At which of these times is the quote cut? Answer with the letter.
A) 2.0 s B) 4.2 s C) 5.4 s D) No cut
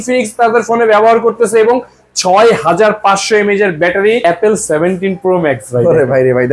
B